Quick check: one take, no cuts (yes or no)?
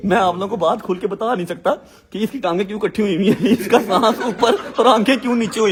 yes